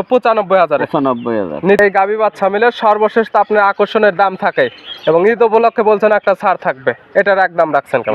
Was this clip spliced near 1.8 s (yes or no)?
yes